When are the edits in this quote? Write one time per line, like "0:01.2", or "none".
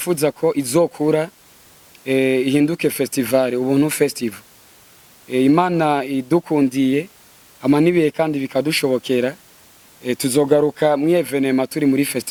none